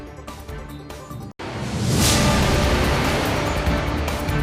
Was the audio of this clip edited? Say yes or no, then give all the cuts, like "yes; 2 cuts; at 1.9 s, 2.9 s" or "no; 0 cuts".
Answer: no; 0 cuts